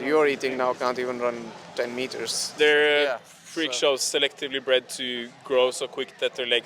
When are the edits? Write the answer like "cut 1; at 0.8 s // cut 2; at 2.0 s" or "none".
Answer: cut 1; at 2.6 s